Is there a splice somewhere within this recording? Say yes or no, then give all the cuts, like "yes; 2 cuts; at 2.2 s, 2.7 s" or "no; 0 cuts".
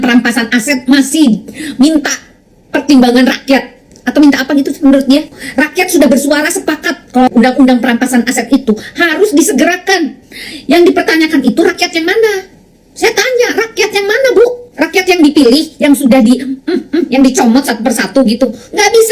yes; 2 cuts; at 5.4 s, 14.6 s